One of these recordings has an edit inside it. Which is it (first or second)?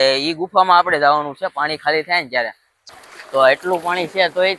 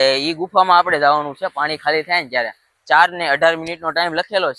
first